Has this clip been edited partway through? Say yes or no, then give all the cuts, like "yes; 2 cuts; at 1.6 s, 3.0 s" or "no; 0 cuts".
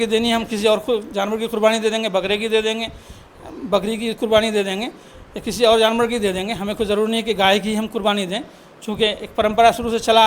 no; 0 cuts